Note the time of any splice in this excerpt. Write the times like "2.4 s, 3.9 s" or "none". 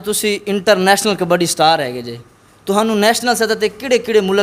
none